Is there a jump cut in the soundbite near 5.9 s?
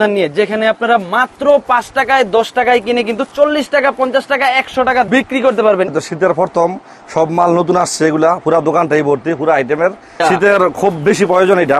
yes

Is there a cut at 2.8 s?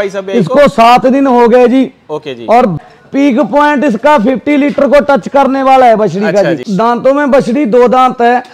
yes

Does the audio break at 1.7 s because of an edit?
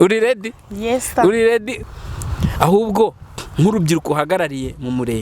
yes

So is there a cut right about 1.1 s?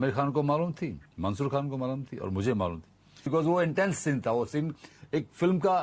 no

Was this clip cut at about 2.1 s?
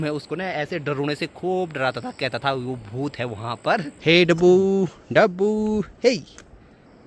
no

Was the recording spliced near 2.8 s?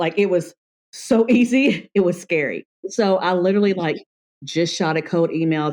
yes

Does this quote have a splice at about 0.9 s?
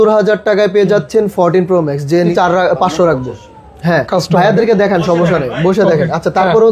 no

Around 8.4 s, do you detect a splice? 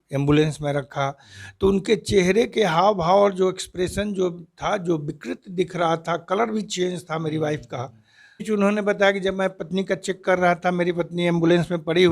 yes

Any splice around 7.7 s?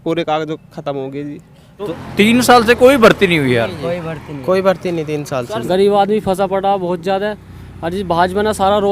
no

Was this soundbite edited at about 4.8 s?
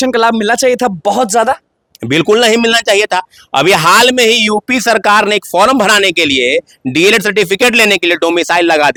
no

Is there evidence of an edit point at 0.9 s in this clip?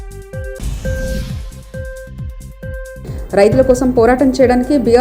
no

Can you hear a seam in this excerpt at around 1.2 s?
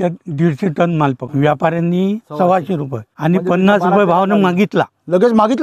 yes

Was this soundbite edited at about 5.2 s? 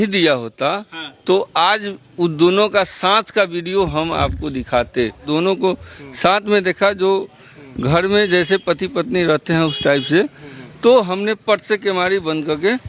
yes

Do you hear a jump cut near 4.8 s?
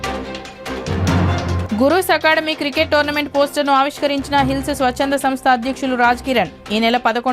no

